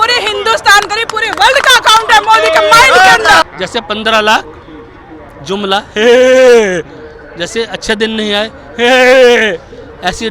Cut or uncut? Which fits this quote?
cut